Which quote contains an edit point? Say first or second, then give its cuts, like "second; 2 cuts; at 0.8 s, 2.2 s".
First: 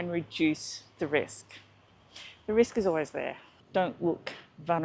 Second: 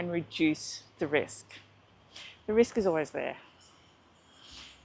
first; 1 cut; at 3.5 s